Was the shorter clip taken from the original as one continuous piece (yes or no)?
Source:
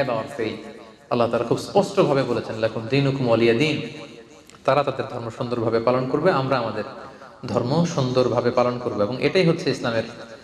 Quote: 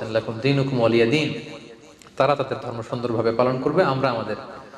yes